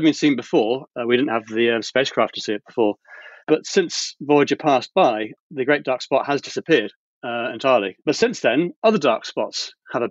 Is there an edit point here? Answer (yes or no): yes